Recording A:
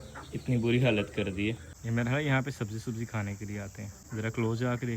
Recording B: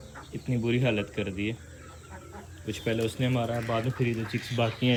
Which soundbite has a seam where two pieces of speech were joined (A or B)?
A